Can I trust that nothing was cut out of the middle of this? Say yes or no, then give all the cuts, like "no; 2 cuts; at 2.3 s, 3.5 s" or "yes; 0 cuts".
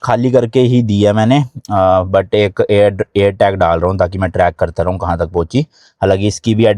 yes; 0 cuts